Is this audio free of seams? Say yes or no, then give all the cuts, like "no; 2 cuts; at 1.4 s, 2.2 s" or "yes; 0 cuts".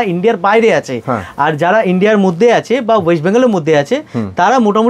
yes; 0 cuts